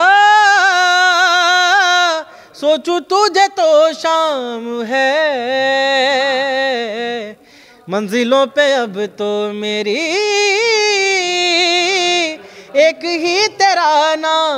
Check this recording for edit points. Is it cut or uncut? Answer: uncut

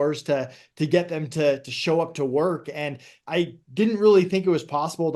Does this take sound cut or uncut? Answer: uncut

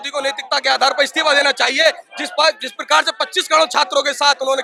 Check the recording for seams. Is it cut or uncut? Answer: uncut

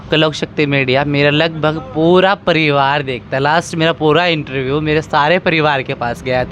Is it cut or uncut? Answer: uncut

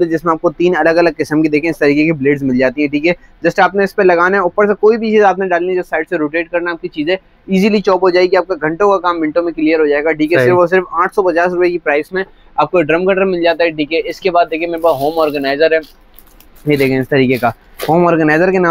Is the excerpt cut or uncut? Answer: uncut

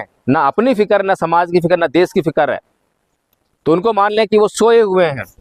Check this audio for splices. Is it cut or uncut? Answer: uncut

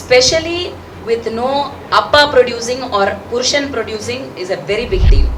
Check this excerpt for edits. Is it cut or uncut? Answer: uncut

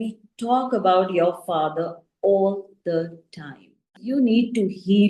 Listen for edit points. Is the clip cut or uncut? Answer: cut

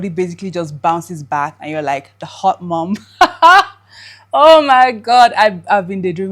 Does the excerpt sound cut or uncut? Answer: uncut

